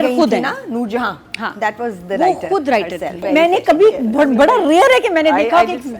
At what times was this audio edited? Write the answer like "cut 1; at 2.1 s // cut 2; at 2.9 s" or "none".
cut 1; at 3.2 s